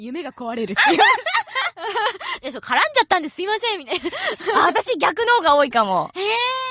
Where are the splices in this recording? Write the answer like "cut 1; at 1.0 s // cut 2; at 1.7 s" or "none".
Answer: cut 1; at 1.1 s